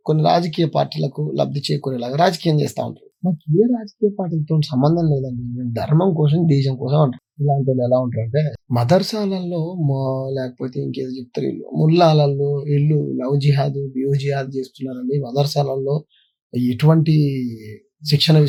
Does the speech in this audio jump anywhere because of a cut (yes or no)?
no